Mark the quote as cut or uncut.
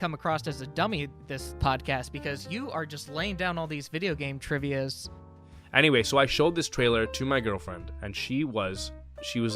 cut